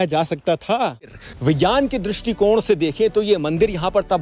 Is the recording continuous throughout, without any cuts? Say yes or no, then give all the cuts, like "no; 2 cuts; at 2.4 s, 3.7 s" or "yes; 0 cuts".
no; 1 cut; at 1.1 s